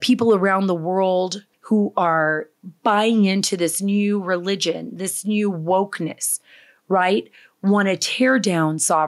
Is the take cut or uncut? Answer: cut